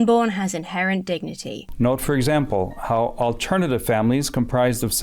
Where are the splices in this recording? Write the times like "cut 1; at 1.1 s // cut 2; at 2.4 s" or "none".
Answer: cut 1; at 1.6 s